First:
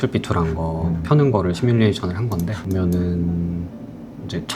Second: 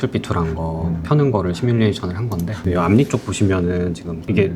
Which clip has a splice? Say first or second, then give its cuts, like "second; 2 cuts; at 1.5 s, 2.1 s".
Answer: second; 1 cut; at 2.5 s